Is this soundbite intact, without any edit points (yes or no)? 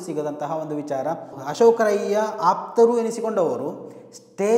no